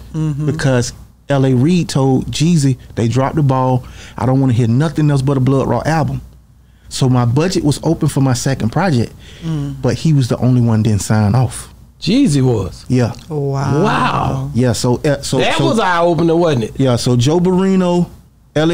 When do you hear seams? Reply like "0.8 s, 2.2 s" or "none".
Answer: none